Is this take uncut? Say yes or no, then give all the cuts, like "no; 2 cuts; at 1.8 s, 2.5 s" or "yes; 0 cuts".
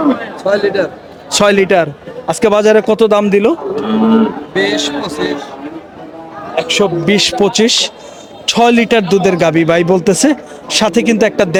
yes; 0 cuts